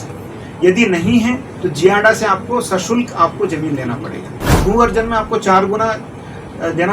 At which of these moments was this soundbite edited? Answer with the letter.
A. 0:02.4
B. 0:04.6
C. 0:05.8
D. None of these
B